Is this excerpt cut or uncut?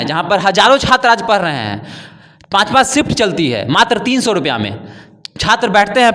uncut